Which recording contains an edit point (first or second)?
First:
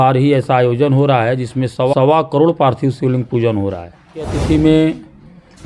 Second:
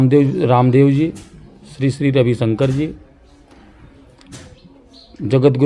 first